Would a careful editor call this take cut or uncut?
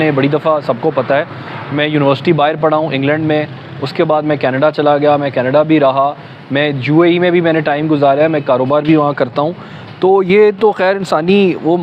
uncut